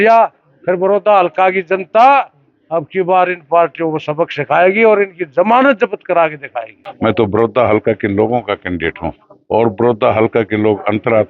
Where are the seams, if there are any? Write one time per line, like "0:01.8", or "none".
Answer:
0:06.8